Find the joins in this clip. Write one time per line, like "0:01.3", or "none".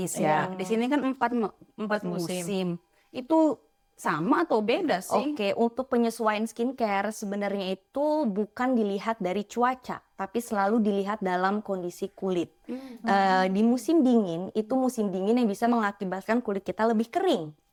none